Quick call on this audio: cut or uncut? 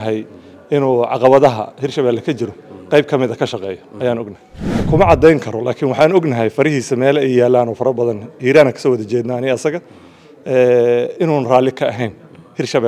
cut